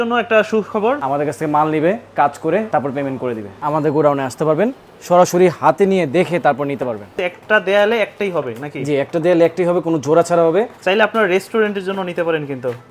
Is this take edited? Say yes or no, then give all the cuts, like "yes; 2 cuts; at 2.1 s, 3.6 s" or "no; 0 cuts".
yes; 4 cuts; at 1.0 s, 3.0 s, 7.1 s, 10.8 s